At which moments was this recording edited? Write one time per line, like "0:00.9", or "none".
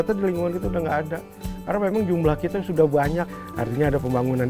0:03.4